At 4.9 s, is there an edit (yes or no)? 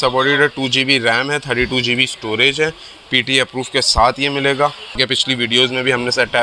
yes